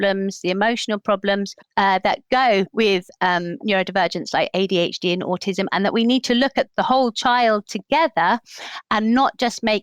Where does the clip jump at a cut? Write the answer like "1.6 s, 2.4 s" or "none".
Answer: none